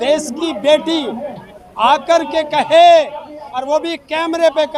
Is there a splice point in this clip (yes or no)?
no